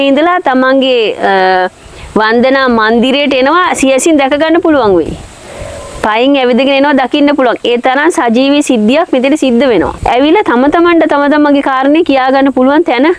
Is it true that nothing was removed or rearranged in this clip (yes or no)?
no